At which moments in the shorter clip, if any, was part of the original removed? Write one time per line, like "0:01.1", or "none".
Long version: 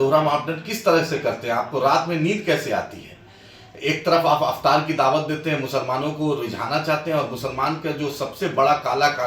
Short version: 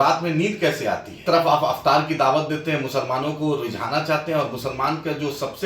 0:01.2